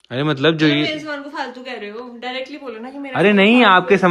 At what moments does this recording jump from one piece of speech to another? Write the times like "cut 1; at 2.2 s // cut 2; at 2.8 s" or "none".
none